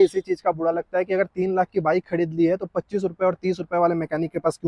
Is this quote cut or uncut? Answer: uncut